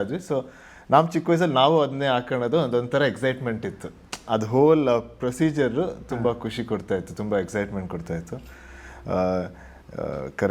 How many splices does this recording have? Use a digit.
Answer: 0